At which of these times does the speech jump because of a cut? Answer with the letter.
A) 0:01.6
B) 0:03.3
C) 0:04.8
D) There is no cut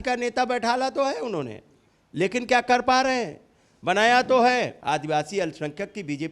C